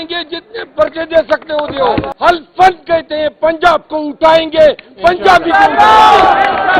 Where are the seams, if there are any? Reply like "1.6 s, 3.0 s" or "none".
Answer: 2.1 s

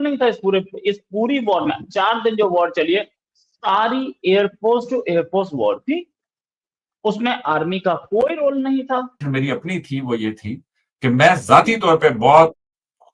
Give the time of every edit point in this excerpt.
9.2 s

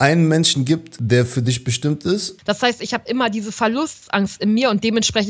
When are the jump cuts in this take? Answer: 0.9 s, 2.3 s

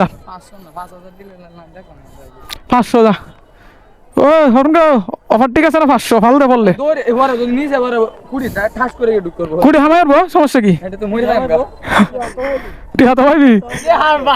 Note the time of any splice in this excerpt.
none

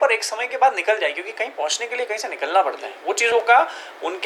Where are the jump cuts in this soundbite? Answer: none

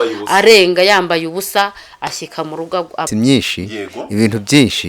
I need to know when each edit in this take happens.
3.1 s

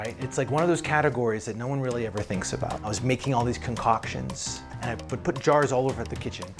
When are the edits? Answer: 2.9 s

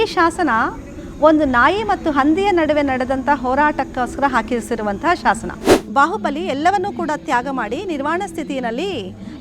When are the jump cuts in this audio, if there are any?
5.7 s

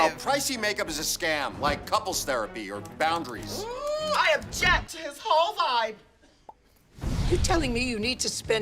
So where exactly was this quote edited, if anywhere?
4.1 s

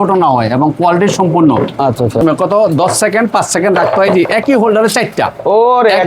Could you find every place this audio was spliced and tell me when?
2.2 s

